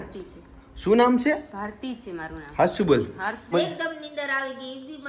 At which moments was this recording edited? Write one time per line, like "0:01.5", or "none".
0:03.5

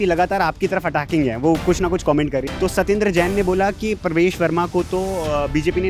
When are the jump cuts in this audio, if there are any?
0:02.5

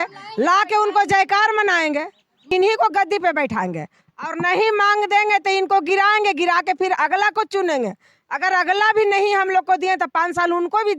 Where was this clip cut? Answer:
0:02.5

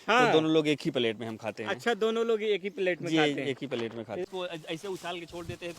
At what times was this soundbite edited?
0:04.3

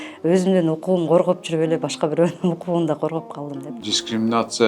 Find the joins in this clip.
0:03.7

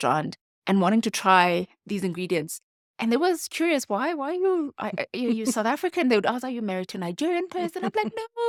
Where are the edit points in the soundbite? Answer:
none

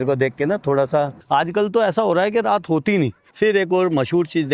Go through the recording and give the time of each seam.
0:01.2
0:03.2

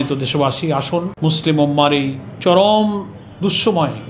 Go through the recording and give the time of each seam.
0:01.1
0:02.2

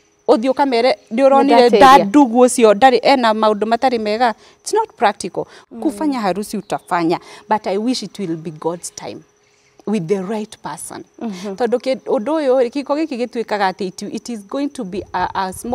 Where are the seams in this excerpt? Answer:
0:05.6

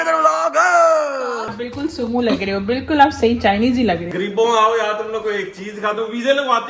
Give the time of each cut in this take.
0:01.5
0:04.2

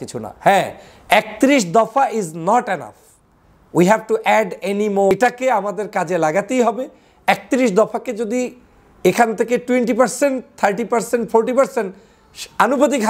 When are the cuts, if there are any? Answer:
0:05.1

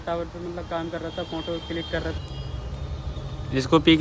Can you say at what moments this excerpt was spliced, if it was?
0:02.2

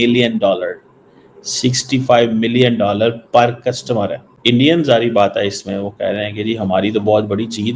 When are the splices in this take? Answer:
0:04.3

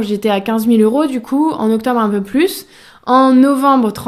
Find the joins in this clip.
none

